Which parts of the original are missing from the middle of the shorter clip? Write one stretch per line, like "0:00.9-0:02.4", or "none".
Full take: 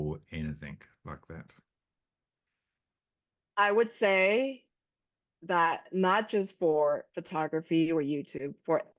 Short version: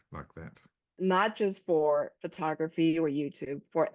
0:01.8-0:05.8